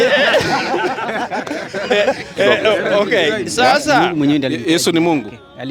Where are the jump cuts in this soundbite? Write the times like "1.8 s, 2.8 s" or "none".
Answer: 4.0 s